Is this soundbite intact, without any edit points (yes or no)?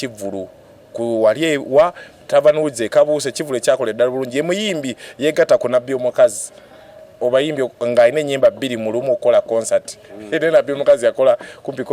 yes